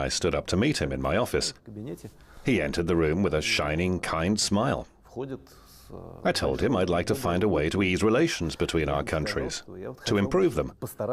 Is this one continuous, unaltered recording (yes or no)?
no